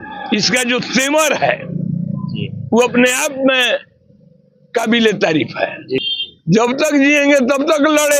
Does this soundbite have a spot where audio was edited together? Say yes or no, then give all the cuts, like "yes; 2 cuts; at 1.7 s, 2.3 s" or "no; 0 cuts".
yes; 1 cut; at 6.0 s